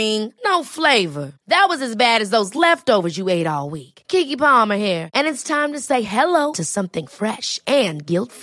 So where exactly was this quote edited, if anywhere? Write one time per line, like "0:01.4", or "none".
none